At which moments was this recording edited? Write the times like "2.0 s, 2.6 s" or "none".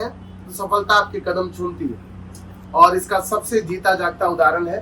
none